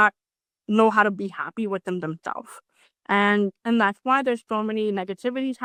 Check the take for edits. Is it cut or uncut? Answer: uncut